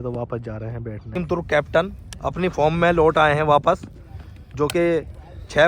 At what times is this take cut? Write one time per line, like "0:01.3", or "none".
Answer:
0:01.2